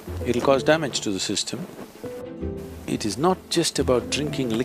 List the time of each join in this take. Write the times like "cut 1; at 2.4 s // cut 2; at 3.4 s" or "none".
cut 1; at 2.2 s